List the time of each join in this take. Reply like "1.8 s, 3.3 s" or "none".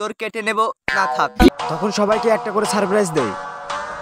1.5 s